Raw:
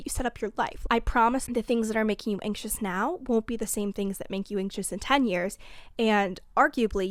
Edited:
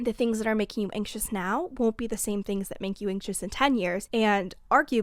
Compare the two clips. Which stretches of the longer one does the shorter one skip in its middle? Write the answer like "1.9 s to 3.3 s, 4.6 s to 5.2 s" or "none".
5.5 s to 5.9 s